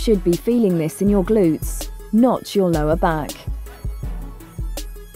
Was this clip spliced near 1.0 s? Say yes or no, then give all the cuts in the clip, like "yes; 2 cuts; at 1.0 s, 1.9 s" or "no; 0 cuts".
no; 1 cut; at 3.3 s